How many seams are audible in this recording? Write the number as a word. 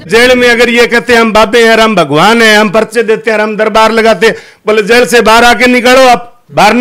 zero